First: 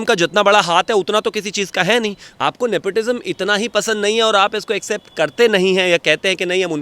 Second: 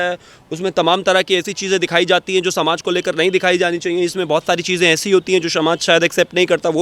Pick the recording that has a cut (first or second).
first